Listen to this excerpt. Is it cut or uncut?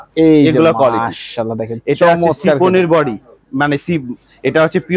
uncut